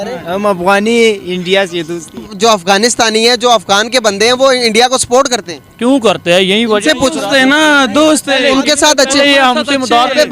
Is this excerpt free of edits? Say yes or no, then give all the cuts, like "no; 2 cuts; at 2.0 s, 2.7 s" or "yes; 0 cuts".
no; 1 cut; at 2.3 s